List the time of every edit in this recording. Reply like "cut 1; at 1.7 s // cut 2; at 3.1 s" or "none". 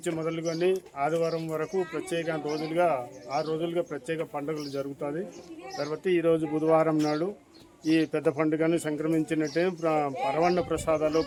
none